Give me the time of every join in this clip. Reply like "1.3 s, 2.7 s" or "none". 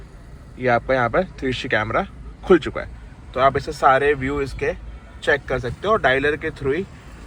none